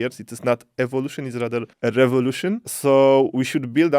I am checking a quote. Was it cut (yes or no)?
yes